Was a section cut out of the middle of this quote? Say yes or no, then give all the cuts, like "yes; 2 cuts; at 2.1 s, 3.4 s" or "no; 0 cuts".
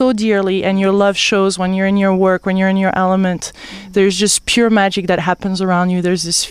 yes; 1 cut; at 4.8 s